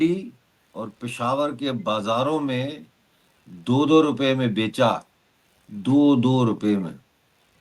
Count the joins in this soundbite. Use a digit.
0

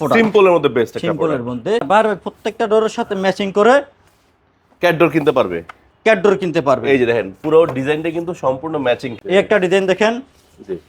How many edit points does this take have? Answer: 2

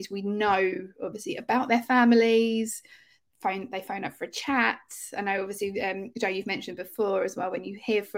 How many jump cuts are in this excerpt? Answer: 0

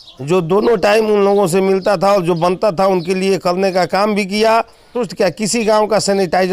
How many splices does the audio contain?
1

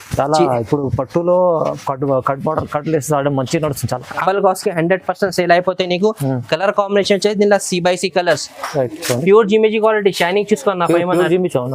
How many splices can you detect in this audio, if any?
1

